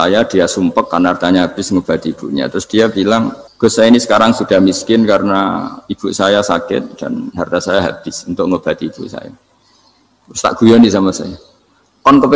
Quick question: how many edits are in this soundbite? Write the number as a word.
one